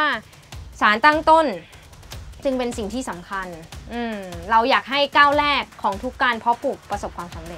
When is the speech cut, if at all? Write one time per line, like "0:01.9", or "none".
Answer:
none